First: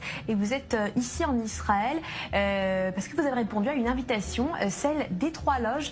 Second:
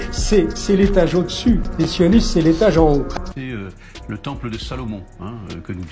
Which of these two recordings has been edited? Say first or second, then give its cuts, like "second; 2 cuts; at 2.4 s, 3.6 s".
second; 1 cut; at 3.2 s